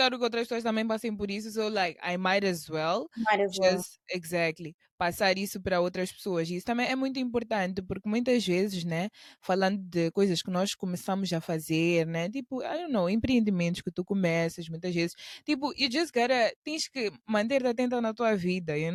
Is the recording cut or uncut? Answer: uncut